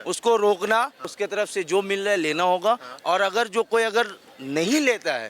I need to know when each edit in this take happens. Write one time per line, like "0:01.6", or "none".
0:01.1